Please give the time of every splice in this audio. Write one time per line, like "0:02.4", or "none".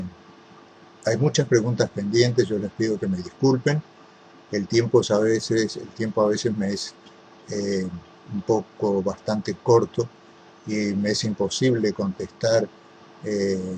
0:05.9

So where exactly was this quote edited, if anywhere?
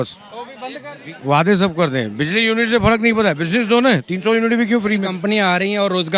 0:00.9
0:05.1

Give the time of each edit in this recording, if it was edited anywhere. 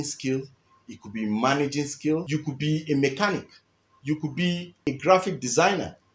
0:02.2
0:04.8

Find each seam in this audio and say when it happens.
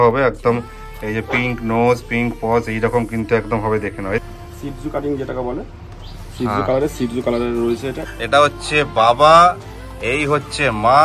0:04.2
0:08.0

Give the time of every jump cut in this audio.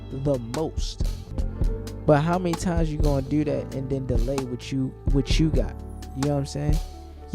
0:01.4

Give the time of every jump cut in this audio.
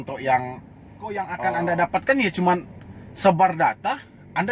0:01.2

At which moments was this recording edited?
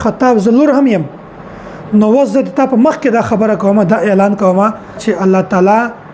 0:05.0

